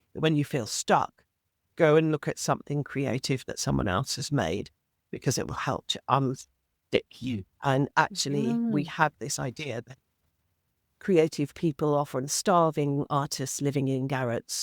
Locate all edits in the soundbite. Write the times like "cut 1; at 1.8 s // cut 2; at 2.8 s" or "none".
cut 1; at 7.5 s